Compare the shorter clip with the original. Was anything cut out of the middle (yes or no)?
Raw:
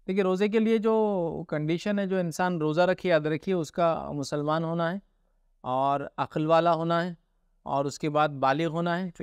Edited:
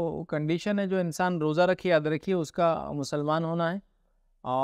no